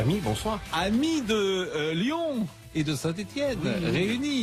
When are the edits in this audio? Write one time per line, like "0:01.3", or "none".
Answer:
none